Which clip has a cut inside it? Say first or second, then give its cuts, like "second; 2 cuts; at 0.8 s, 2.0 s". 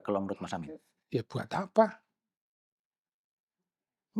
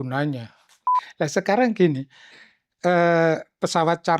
second; 1 cut; at 1.0 s